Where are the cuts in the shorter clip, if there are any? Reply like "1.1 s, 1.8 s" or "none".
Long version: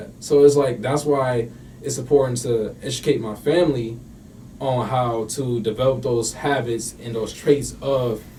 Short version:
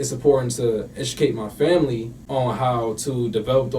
2.1 s